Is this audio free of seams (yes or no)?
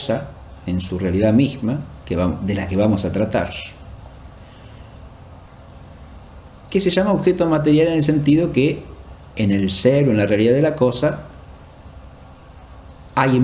no